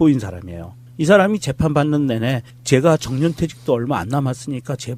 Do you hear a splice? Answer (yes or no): yes